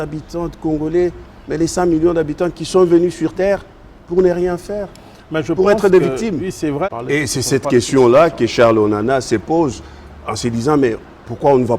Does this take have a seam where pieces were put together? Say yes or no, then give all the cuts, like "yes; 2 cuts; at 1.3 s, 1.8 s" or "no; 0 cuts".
yes; 1 cut; at 6.9 s